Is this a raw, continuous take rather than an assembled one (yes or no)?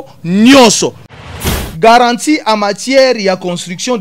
no